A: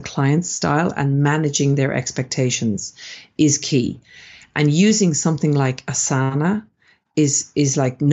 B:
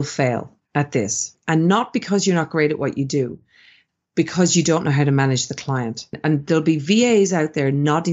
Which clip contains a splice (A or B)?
B